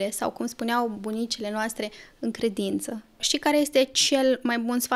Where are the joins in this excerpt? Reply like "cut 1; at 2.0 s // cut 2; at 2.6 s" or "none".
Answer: cut 1; at 3.3 s